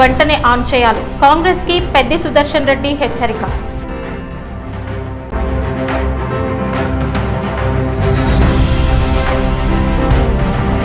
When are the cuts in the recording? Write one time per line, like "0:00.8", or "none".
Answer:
0:05.2